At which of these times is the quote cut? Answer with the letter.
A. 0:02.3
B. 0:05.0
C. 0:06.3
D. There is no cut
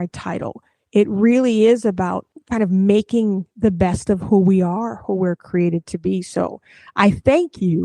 A